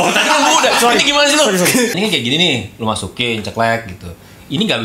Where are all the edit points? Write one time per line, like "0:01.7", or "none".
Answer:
0:01.9